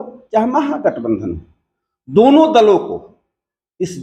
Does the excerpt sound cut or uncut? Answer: uncut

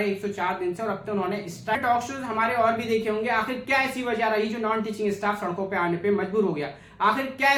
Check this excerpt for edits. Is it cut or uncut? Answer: uncut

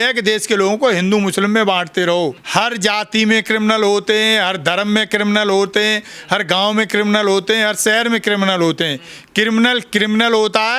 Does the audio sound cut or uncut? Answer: cut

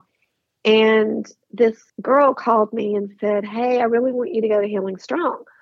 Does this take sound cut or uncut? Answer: cut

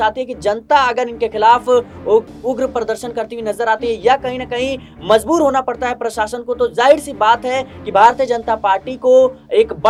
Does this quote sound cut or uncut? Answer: uncut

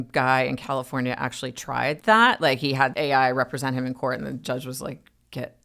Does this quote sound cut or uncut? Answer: cut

